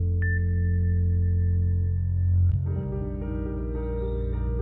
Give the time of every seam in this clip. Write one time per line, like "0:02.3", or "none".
none